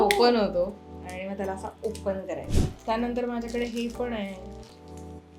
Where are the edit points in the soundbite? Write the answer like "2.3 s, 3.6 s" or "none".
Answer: 2.4 s